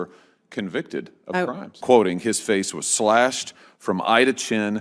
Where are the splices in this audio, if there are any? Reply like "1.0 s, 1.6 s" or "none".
1.7 s